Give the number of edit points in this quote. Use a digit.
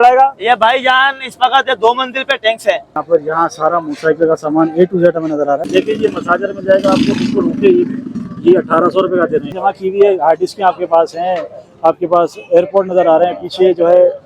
3